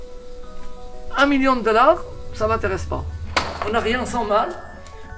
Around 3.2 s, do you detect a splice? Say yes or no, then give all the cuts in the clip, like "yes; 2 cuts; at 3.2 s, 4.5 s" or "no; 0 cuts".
yes; 1 cut; at 3.2 s